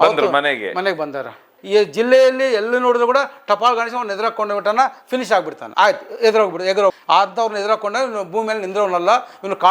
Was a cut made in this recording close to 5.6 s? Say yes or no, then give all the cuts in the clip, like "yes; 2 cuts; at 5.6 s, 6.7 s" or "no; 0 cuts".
yes; 3 cuts; at 1.5 s, 5.6 s, 7.0 s